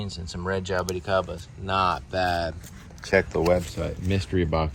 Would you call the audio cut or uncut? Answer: uncut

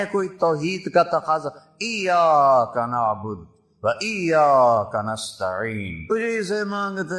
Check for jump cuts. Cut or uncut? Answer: cut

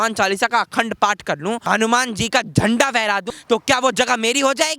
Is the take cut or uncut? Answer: cut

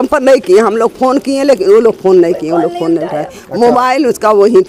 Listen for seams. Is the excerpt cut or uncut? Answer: uncut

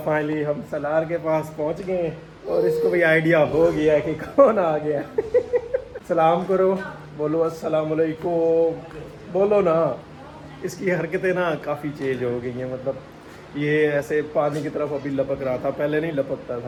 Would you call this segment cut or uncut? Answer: uncut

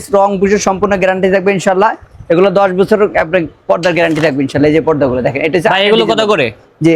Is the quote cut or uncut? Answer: uncut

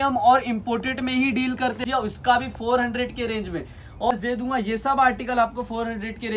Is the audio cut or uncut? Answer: cut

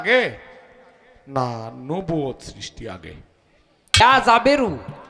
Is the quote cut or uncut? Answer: cut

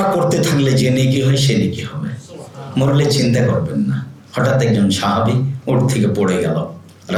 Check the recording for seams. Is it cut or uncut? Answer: uncut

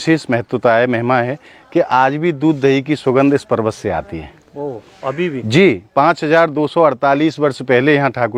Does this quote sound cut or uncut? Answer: uncut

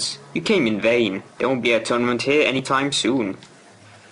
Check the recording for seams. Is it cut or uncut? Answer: cut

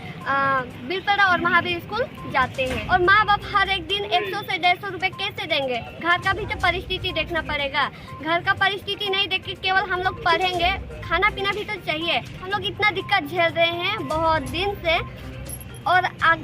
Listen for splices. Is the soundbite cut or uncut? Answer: cut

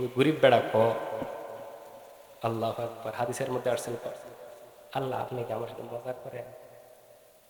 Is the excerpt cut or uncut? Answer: uncut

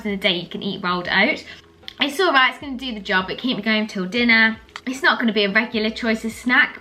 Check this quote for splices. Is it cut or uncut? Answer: uncut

